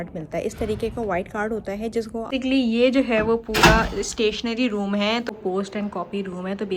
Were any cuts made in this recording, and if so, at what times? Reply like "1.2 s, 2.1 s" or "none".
2.3 s, 5.3 s